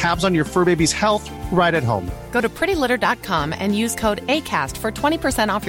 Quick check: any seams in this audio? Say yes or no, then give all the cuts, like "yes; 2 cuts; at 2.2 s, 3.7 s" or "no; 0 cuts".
no; 0 cuts